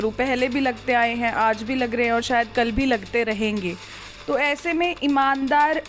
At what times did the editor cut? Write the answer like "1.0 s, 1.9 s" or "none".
none